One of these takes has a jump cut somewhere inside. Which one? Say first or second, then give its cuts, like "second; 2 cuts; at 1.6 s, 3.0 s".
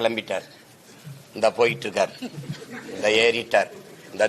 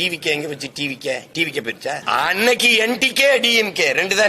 second; 1 cut; at 2.0 s